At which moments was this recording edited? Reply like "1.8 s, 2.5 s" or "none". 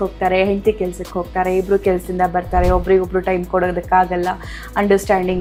none